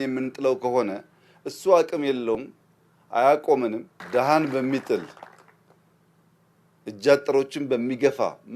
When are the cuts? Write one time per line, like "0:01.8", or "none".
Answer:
0:03.9